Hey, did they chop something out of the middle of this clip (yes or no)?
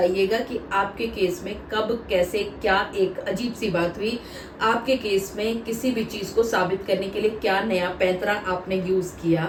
no